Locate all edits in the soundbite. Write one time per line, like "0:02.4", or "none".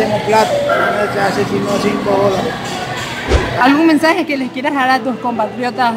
0:03.6